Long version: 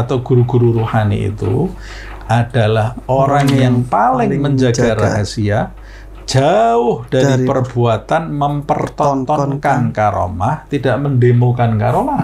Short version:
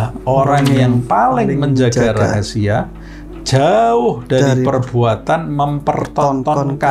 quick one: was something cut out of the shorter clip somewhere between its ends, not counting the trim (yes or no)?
no